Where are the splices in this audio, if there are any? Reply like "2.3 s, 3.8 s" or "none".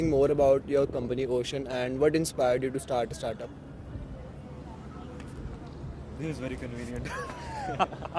none